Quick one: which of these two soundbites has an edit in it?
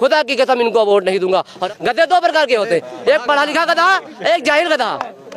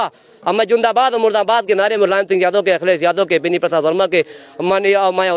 first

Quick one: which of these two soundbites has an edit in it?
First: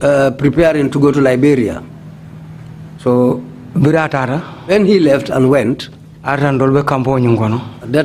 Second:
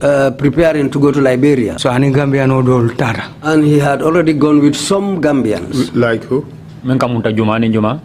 second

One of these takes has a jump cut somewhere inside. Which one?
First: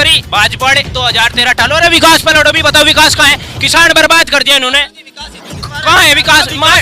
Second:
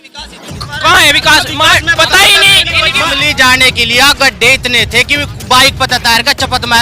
second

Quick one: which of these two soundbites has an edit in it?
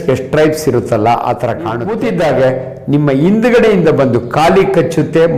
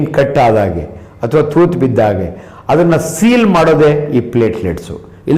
first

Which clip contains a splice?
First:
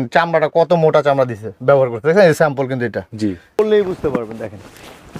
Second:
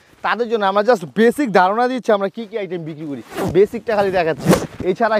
first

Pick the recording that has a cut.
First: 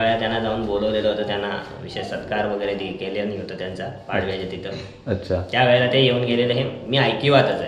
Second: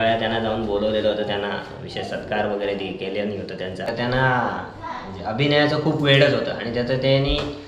second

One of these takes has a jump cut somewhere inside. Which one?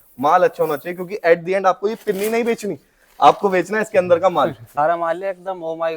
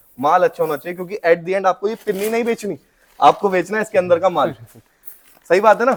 first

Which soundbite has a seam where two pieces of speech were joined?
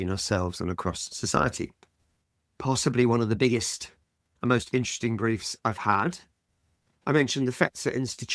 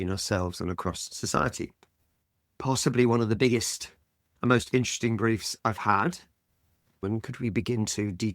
second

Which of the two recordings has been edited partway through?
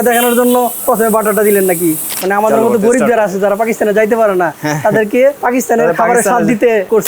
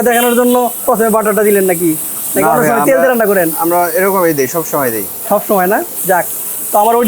first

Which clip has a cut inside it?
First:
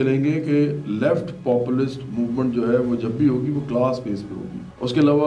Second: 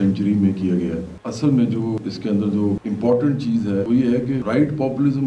second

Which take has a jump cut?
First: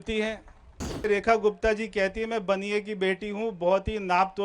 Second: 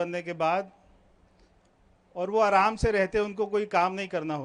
first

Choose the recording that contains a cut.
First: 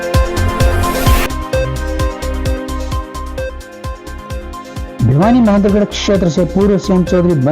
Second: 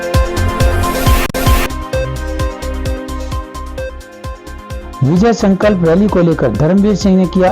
second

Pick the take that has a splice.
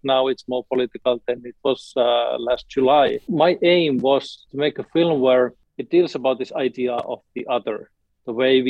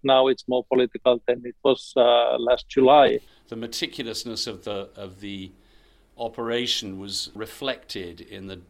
second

